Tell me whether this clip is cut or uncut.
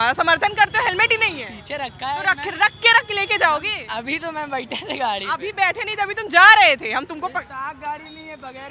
uncut